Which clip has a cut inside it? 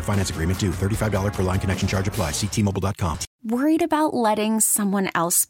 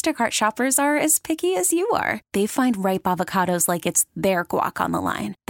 first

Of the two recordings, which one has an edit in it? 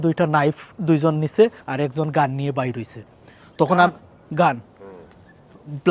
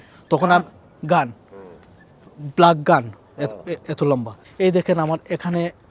second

